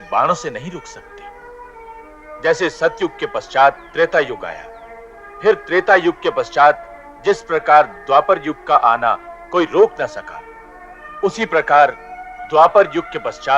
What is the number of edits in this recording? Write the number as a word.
zero